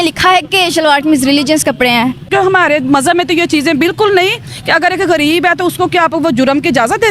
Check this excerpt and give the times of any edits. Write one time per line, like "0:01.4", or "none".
0:02.3